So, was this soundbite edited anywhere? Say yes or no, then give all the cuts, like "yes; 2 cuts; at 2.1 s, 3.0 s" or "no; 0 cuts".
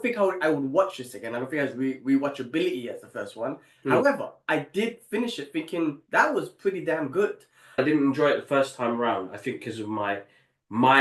yes; 1 cut; at 7.8 s